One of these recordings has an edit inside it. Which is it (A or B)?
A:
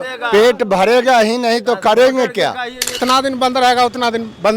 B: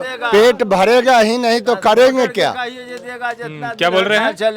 A